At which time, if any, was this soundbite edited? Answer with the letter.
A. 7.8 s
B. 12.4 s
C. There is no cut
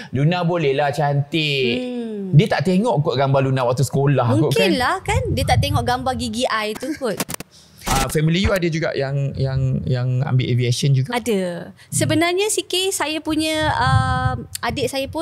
A